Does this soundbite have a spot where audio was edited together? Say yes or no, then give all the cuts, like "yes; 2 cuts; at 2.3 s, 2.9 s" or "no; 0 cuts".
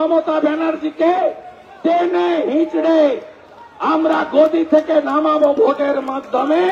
no; 0 cuts